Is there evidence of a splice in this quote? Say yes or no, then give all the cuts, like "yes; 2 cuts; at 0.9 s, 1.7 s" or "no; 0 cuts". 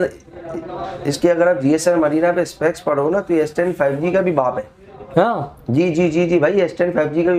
no; 0 cuts